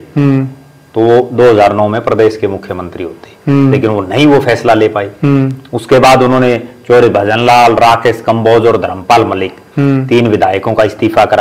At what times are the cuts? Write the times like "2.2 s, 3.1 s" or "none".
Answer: none